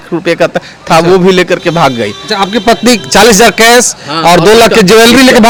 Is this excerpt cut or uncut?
uncut